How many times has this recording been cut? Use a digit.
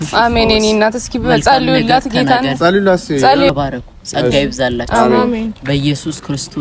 1